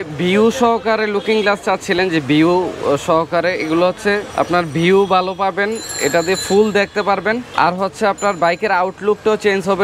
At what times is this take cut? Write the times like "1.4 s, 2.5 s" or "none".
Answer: none